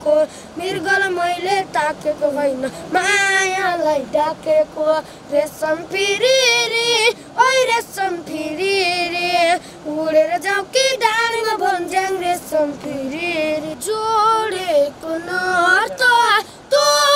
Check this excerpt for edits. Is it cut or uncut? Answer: cut